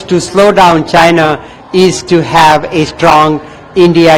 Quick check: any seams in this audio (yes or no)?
no